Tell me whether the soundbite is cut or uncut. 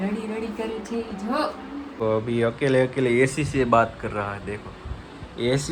uncut